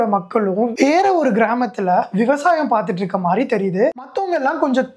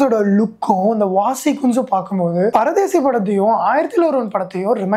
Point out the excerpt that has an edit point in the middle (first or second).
first